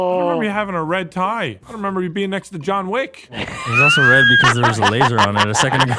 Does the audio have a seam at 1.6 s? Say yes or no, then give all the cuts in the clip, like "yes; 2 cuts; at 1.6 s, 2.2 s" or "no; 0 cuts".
yes; 1 cut; at 1.6 s